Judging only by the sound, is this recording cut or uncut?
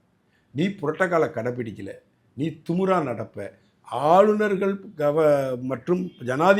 uncut